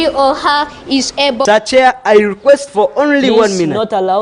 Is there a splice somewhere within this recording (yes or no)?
yes